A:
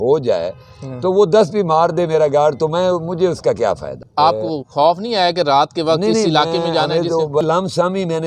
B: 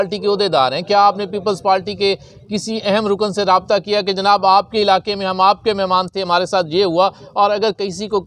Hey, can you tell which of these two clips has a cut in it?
A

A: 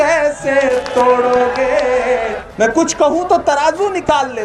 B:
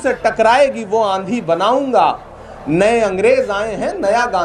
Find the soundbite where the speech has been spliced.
A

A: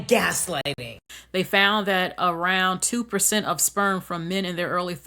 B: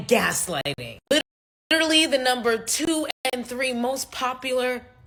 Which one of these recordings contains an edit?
A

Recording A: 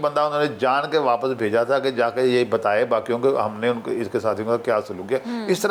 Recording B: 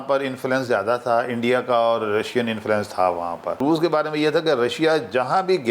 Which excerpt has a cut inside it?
B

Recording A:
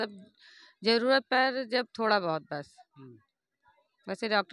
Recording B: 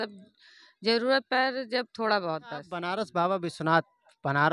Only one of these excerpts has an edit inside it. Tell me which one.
B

